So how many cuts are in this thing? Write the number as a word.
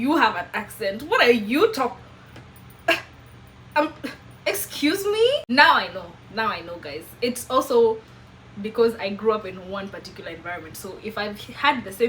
zero